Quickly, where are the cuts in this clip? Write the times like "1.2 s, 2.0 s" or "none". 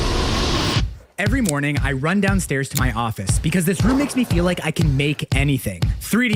none